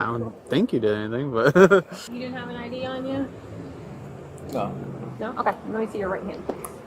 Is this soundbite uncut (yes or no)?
no